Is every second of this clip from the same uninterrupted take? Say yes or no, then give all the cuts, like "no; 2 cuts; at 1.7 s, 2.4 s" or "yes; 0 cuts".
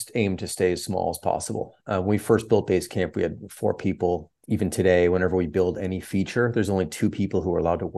yes; 0 cuts